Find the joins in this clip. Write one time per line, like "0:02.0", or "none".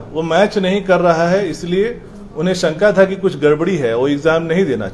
none